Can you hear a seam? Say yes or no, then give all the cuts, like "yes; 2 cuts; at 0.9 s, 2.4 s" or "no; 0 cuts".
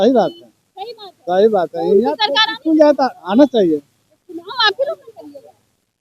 no; 0 cuts